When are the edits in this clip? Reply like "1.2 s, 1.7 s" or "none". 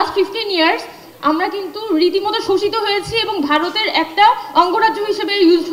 none